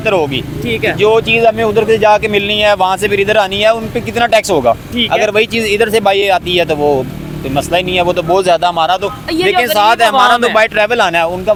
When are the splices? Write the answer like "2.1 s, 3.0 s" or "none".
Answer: none